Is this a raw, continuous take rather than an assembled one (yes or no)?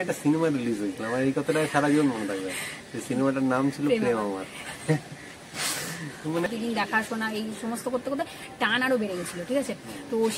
no